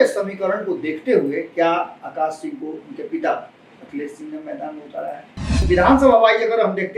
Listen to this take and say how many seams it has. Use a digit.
1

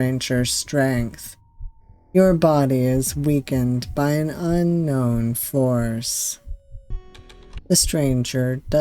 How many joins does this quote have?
1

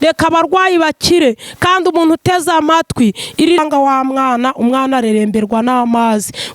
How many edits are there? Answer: 1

